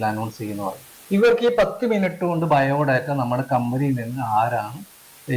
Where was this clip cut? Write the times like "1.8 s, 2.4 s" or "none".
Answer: none